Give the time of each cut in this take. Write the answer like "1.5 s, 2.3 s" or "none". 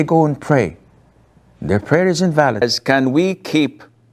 2.6 s